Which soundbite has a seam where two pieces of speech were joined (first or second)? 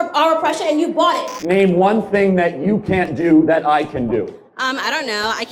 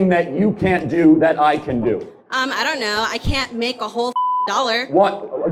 first